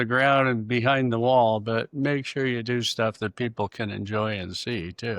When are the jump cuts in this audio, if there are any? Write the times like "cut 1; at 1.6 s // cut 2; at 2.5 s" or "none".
none